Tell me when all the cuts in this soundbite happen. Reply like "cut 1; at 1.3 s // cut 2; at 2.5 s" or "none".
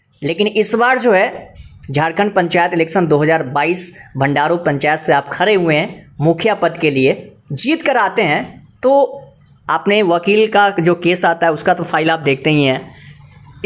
none